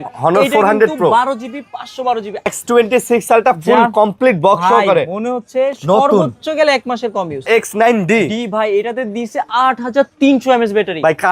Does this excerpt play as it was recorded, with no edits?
no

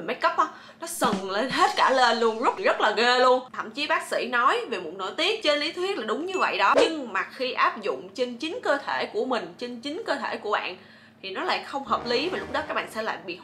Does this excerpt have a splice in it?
yes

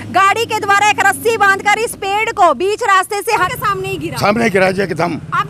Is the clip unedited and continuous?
no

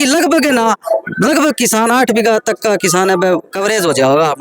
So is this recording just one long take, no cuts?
yes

